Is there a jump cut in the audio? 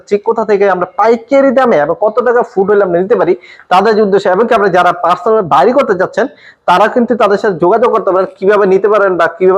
no; 0 cuts

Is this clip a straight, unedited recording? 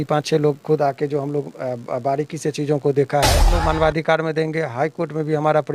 no; 1 cut; at 3.5 s

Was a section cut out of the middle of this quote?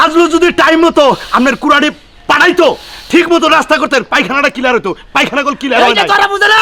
no; 0 cuts

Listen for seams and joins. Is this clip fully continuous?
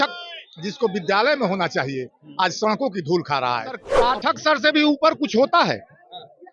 no; 1 cut; at 3.9 s

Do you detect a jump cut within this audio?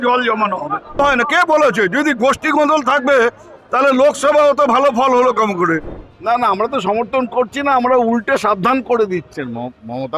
yes; 3 cuts; at 1.0 s, 6.0 s, 9.4 s

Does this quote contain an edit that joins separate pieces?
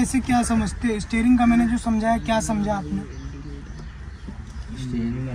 no; 0 cuts

